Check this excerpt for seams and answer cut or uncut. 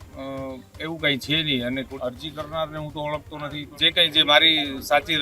cut